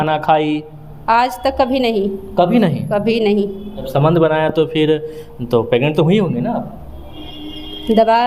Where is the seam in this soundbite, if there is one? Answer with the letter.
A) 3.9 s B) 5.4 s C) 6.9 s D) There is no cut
A